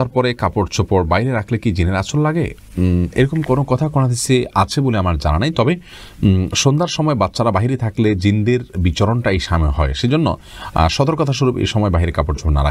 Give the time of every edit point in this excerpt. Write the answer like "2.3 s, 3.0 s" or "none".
none